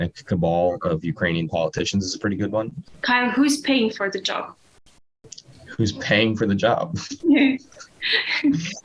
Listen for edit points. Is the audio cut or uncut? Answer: cut